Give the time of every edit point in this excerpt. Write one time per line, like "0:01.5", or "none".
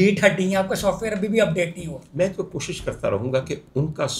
0:02.0